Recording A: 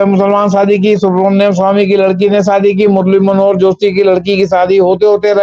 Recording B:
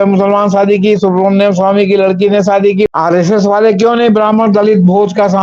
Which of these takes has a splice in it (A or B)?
B